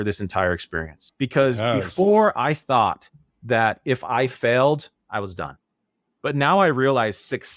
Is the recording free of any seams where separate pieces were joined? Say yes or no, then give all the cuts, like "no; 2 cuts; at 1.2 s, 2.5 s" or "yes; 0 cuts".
no; 1 cut; at 1.0 s